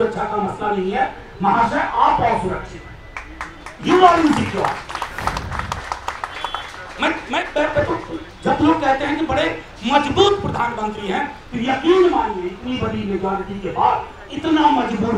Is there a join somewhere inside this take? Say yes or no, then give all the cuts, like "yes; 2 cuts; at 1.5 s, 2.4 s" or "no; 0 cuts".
no; 0 cuts